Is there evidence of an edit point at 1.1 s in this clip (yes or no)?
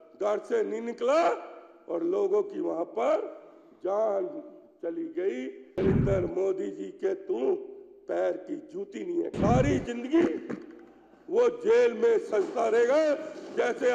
no